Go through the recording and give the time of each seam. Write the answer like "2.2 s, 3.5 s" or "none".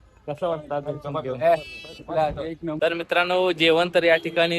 2.8 s